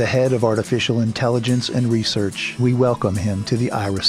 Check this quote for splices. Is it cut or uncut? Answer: cut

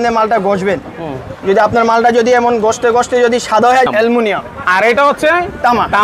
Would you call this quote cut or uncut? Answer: cut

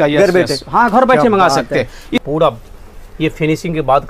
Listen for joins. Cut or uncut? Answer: cut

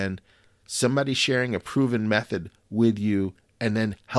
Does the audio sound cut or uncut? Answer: uncut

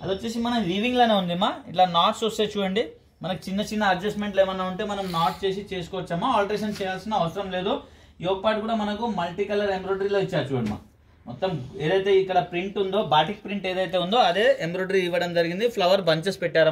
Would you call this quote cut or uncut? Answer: uncut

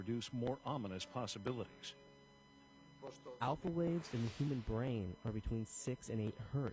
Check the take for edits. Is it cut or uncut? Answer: uncut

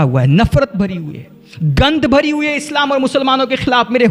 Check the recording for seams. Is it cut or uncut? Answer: uncut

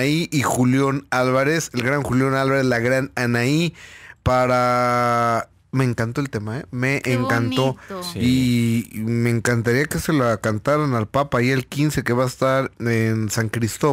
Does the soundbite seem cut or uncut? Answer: cut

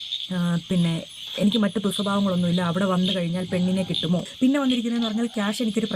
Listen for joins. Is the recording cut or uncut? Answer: cut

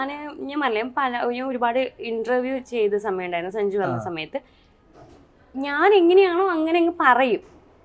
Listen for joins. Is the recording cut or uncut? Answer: uncut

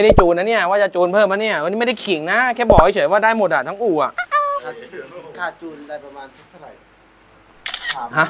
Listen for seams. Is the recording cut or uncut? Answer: uncut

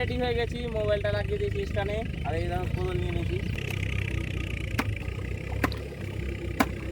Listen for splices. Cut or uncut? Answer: cut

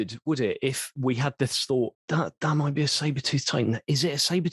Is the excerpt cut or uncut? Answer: cut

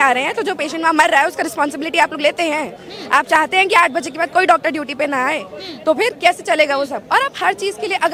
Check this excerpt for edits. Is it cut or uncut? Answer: uncut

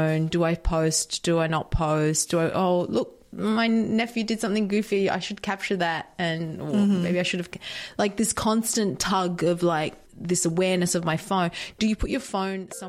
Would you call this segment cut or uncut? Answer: cut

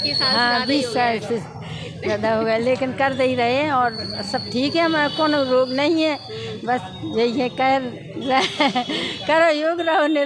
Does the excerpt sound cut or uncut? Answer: uncut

